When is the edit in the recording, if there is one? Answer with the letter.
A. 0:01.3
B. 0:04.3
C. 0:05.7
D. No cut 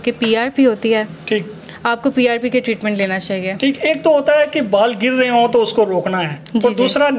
D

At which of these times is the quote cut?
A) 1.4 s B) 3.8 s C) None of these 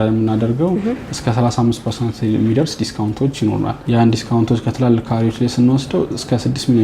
B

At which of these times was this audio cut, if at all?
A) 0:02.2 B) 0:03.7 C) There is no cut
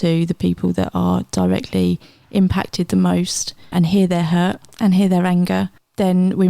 B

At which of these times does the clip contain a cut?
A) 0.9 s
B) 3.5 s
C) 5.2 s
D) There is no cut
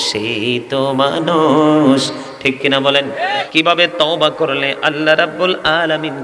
B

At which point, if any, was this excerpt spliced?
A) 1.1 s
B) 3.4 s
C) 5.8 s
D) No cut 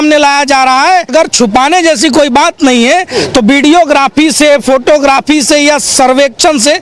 A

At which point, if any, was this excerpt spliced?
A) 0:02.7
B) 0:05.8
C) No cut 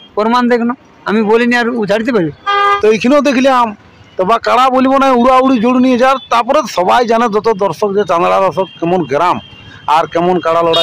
A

